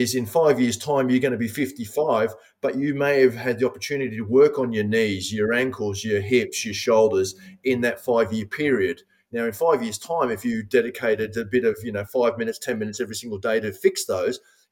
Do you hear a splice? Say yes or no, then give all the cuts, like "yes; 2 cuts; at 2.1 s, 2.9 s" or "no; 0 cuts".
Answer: no; 0 cuts